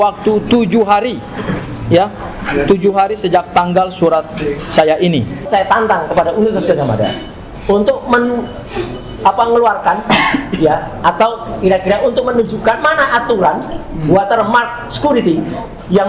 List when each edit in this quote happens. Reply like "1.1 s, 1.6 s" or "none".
5.5 s